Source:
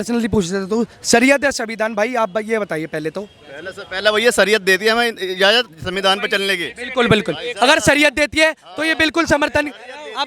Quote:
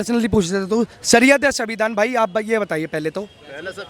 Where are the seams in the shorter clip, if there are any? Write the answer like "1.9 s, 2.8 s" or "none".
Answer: none